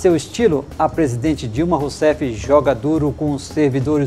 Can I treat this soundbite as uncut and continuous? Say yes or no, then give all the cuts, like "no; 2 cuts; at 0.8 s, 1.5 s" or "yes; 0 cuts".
yes; 0 cuts